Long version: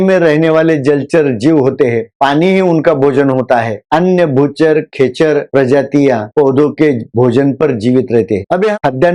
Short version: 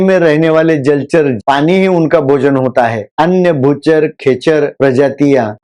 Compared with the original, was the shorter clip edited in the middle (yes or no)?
yes